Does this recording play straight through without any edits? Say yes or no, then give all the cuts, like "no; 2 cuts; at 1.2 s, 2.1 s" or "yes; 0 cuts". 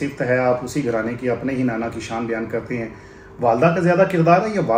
yes; 0 cuts